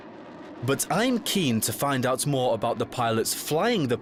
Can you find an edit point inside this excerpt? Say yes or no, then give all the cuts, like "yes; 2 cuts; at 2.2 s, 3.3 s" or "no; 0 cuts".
no; 0 cuts